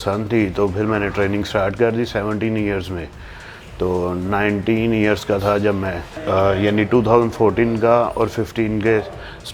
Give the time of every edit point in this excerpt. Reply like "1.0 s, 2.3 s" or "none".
none